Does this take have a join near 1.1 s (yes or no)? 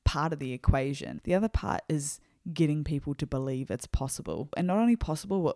yes